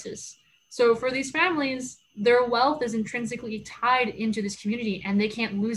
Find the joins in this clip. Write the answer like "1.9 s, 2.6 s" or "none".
none